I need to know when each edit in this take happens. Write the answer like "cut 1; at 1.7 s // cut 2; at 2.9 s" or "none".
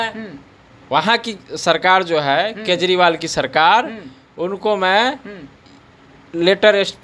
none